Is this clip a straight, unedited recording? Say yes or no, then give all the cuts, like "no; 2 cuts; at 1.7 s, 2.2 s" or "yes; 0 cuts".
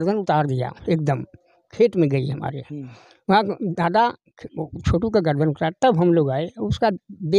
yes; 0 cuts